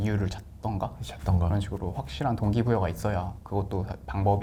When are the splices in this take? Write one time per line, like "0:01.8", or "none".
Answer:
none